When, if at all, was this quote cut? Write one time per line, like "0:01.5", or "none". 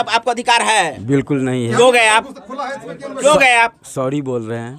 none